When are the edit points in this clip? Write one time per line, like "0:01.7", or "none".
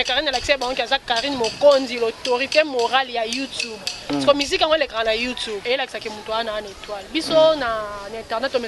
0:05.6

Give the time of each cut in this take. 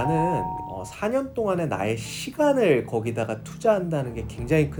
none

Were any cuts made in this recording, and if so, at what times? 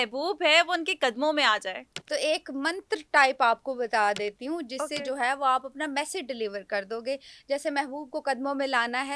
0:01.9

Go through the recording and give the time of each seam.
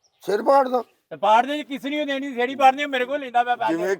none

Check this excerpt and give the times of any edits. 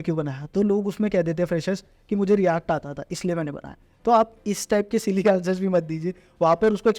none

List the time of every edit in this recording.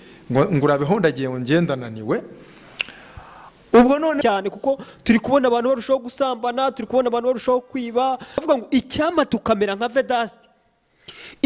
0:04.2
0:08.4

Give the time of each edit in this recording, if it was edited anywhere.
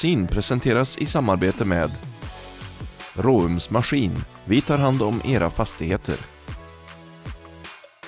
none

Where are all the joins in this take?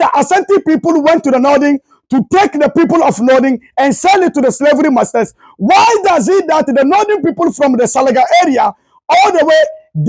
none

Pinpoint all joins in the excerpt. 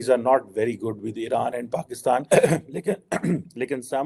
none

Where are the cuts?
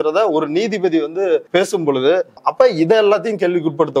0:01.5
0:02.3

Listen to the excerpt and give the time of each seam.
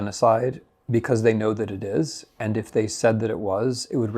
none

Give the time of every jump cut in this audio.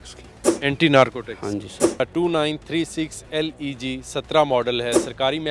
0:02.0

